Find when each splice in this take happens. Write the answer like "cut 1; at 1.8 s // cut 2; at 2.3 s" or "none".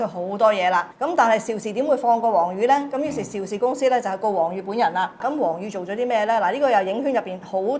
cut 1; at 0.9 s // cut 2; at 5.2 s